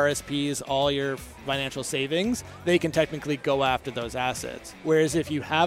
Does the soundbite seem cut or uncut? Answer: uncut